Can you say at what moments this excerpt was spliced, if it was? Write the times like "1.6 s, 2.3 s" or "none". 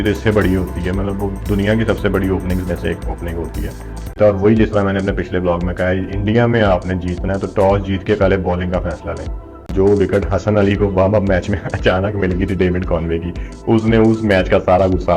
4.1 s, 9.6 s